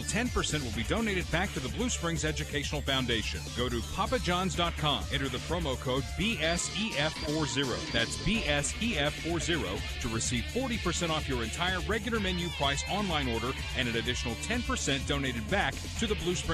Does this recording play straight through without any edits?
yes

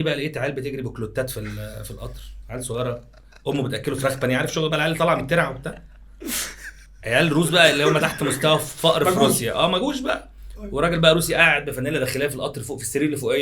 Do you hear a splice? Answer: no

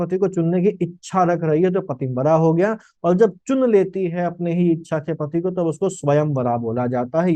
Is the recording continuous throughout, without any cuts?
yes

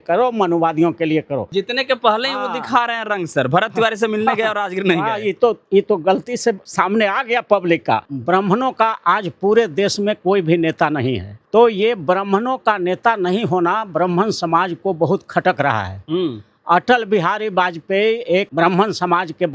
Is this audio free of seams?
no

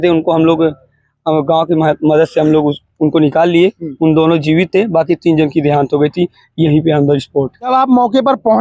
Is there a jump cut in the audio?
no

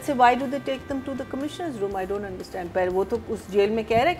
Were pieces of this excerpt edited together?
no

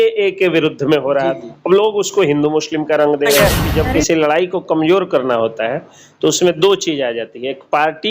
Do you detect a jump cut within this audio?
yes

